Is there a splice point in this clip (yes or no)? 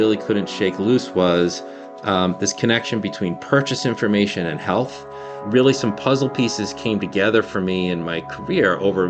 no